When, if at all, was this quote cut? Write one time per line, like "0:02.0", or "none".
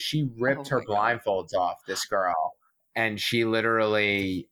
0:02.8